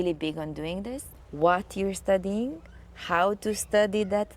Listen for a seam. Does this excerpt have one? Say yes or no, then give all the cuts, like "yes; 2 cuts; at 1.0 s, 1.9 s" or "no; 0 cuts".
yes; 1 cut; at 1.0 s